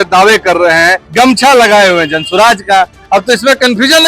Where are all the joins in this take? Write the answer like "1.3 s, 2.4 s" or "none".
1.0 s